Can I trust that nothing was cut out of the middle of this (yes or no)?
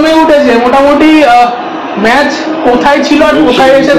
yes